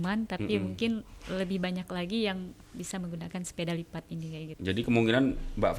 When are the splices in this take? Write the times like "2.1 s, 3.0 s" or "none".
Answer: 4.5 s